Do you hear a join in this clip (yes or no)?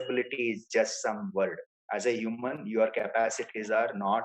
yes